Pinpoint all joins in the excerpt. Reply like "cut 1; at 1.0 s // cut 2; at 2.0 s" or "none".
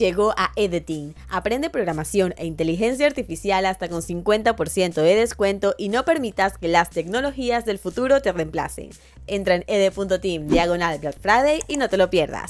none